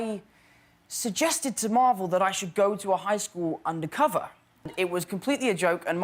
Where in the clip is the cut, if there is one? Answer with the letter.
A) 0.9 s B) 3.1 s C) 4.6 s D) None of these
C